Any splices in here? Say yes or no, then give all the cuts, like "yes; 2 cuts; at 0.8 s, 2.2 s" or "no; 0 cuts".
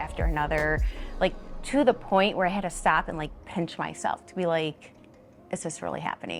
no; 0 cuts